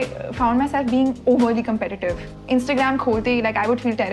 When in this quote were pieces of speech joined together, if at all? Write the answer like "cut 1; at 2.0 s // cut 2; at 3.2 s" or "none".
cut 1; at 2.3 s